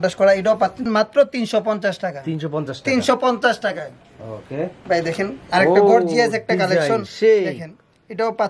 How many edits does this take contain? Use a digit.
0